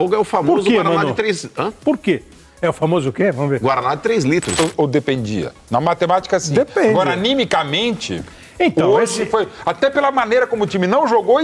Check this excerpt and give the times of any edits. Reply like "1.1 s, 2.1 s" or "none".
4.6 s